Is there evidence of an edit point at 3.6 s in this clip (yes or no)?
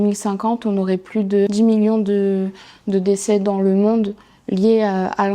no